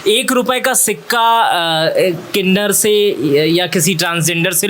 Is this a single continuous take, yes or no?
yes